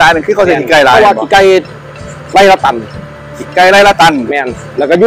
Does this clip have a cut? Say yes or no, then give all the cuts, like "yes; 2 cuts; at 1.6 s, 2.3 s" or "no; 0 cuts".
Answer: no; 0 cuts